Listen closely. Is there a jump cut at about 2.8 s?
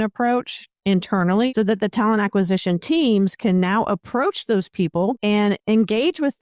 no; 2 cuts; at 1.5 s, 5.2 s

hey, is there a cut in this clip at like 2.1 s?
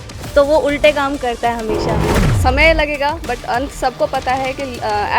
yes; 1 cut; at 2.1 s

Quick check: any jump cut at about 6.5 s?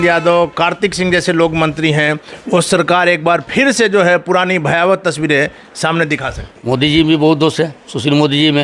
yes; 1 cut; at 6.5 s

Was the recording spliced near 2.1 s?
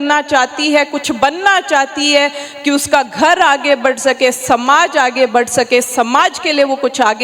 no; 0 cuts

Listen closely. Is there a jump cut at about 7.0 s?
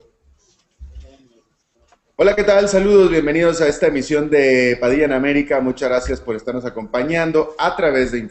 yes; 1 cut; at 7.0 s

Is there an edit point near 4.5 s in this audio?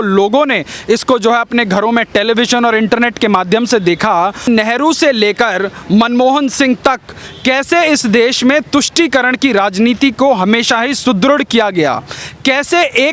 yes; 1 cut; at 4.5 s

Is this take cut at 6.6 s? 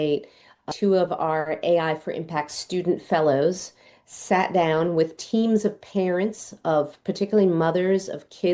no; 0 cuts

